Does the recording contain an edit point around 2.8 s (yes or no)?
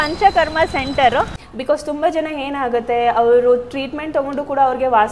no